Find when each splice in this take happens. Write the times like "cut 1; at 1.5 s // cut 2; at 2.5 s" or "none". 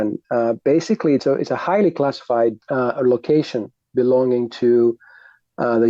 cut 1; at 1.2 s // cut 2; at 2.6 s